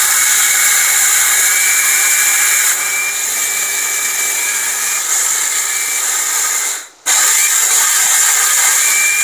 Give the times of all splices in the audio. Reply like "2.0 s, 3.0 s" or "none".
none